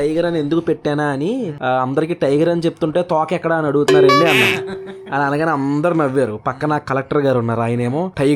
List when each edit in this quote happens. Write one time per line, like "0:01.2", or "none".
none